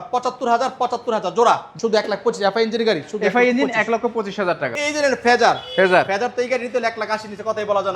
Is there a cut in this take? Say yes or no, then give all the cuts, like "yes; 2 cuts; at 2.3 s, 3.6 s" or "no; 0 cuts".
yes; 2 cuts; at 1.7 s, 4.7 s